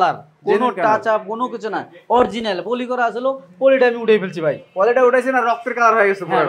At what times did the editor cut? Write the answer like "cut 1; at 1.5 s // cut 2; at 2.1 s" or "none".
none